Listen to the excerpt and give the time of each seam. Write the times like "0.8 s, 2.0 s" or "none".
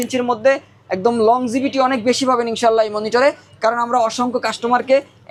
none